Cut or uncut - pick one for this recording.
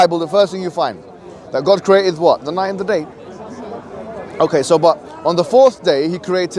uncut